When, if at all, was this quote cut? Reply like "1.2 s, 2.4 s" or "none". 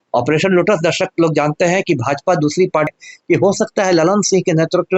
2.9 s